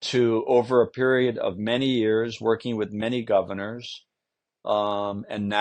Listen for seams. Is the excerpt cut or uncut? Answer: uncut